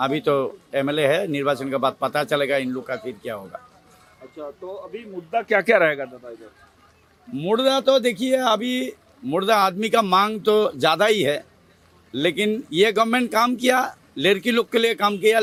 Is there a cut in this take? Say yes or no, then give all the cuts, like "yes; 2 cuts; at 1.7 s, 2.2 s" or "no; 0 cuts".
no; 0 cuts